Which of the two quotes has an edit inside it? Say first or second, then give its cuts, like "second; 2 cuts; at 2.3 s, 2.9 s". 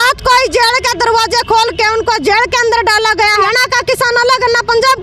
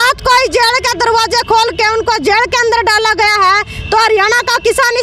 first; 1 cut; at 3.4 s